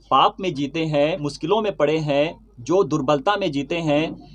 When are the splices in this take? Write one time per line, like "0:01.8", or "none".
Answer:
none